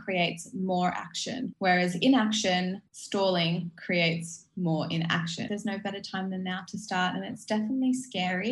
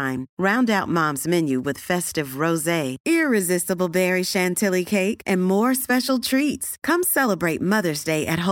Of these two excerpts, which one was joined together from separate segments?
first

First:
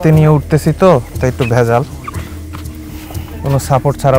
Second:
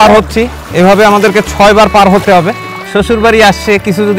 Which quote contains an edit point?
second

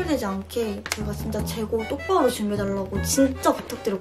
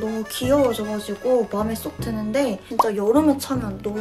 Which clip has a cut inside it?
second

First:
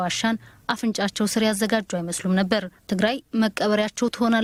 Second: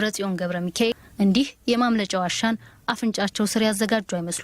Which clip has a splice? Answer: second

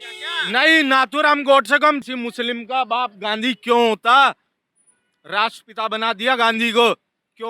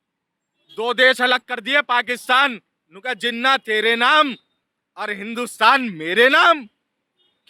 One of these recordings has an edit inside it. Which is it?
first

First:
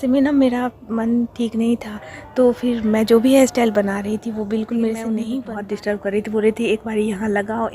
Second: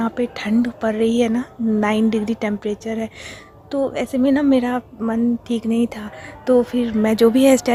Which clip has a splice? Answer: first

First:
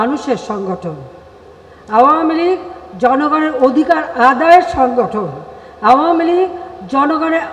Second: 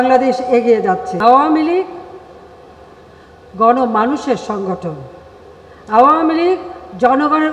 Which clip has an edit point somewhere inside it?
second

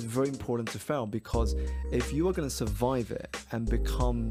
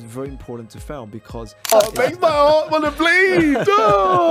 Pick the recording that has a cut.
second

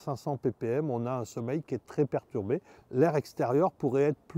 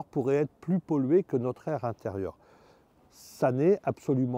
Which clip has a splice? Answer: first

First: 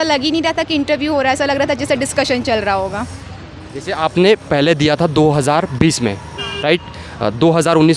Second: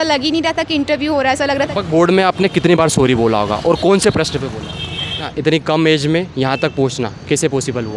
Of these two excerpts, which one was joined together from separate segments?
second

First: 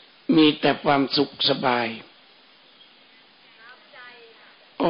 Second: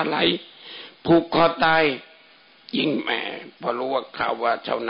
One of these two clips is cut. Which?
second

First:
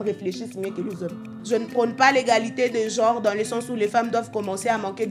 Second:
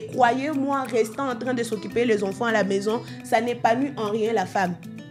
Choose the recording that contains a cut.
first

